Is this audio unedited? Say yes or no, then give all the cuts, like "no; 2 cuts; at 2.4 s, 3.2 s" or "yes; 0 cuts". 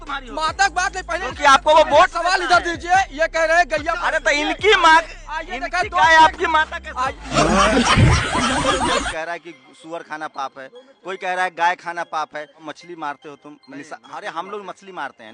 no; 3 cuts; at 7.1 s, 9.1 s, 12.6 s